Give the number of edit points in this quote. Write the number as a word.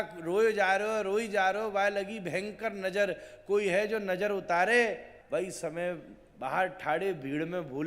one